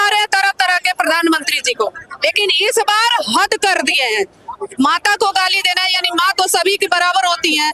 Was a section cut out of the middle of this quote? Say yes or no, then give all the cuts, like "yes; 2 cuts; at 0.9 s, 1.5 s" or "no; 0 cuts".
no; 0 cuts